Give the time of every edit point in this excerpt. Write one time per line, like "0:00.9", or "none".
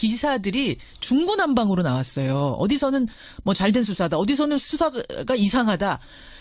0:02.9